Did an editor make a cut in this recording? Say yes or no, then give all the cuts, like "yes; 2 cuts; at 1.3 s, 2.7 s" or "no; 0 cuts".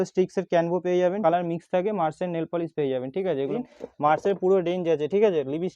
yes; 2 cuts; at 1.2 s, 3.6 s